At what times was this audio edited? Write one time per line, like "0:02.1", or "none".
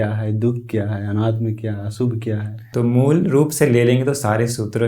0:02.6